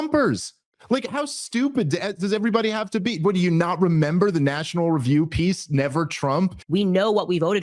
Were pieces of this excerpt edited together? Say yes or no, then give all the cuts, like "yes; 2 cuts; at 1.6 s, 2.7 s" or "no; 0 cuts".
yes; 1 cut; at 6.6 s